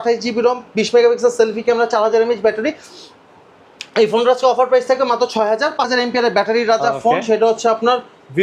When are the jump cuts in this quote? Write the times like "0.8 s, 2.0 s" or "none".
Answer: 5.9 s